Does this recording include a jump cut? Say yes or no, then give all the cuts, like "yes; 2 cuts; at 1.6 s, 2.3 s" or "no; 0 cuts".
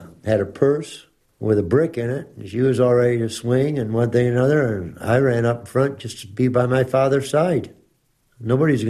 no; 0 cuts